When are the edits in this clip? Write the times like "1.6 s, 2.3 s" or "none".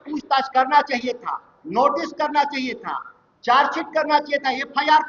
none